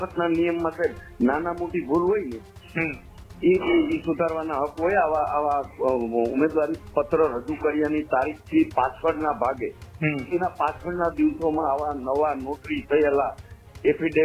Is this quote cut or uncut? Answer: uncut